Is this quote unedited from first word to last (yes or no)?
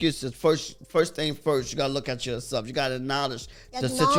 yes